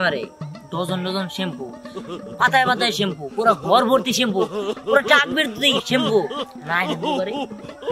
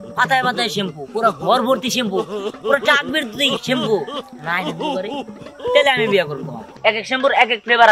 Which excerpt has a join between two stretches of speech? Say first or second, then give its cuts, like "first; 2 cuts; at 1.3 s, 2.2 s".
second; 1 cut; at 6.7 s